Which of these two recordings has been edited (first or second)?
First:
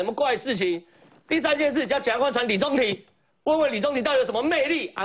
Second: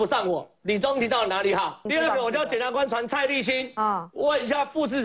second